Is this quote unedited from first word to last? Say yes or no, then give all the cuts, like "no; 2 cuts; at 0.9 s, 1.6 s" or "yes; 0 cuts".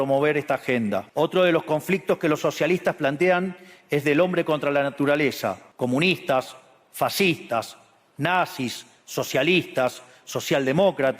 no; 2 cuts; at 1.1 s, 5.6 s